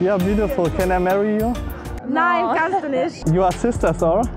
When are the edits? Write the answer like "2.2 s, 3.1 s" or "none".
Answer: 3.2 s